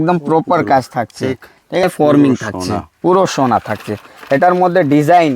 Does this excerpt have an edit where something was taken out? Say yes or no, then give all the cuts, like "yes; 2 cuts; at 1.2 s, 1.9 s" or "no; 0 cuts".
yes; 1 cut; at 1.8 s